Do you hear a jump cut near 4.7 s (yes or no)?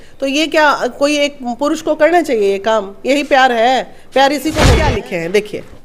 yes